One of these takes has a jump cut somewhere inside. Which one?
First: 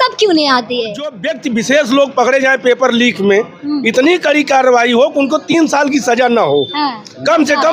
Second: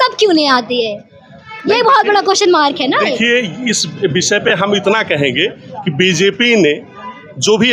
first; 1 cut; at 1.3 s

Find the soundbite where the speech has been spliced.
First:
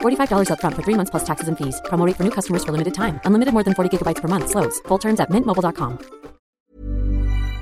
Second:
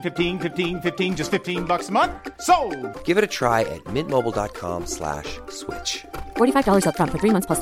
first; 1 cut; at 6.5 s

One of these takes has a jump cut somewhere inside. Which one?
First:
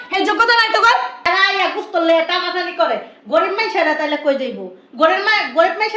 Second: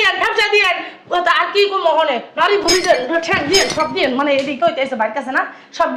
first; 1 cut; at 1.3 s

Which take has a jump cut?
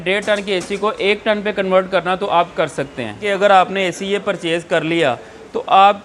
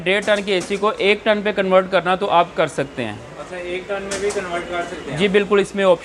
first; 1 cut; at 3.2 s

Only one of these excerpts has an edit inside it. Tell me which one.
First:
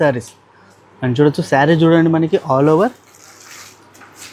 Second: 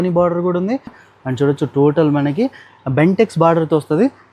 second; 1 cut; at 1.0 s

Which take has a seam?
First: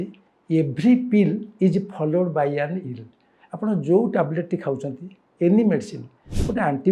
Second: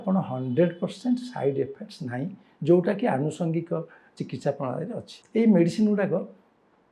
second; 1 cut; at 5.1 s

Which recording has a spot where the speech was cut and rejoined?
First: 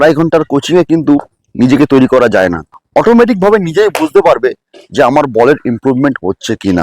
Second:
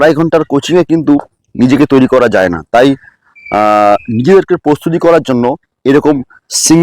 first; 1 cut; at 2.6 s

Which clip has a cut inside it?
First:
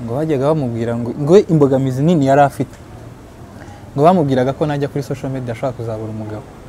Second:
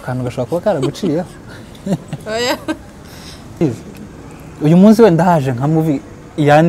second; 1 cut; at 3.6 s

